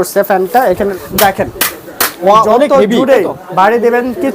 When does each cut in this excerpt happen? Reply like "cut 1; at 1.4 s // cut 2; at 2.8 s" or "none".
cut 1; at 0.9 s